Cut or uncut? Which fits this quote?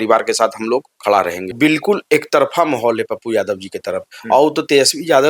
cut